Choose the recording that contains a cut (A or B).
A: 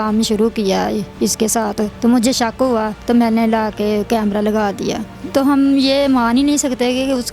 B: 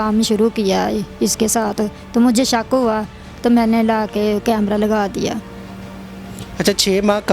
A